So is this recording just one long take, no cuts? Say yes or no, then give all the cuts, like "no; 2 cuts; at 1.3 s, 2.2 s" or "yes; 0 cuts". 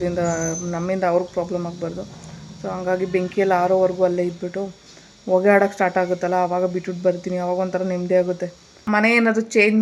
no; 1 cut; at 8.8 s